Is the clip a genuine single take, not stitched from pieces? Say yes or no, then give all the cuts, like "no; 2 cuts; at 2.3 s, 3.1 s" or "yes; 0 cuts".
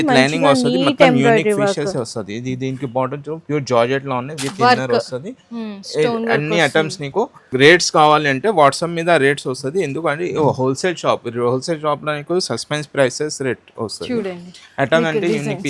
yes; 0 cuts